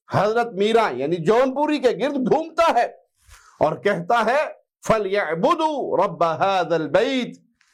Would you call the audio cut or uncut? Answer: uncut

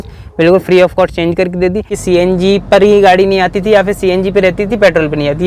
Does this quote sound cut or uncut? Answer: cut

